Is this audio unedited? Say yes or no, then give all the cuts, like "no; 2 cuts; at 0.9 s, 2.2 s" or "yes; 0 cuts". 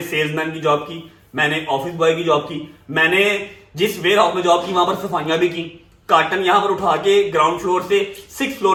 yes; 0 cuts